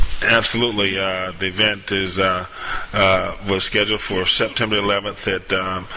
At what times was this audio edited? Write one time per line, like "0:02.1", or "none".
none